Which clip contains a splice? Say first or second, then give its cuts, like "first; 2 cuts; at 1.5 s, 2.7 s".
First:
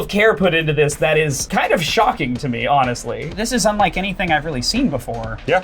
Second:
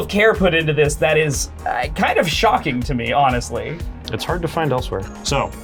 first; 2 cuts; at 1.4 s, 3.2 s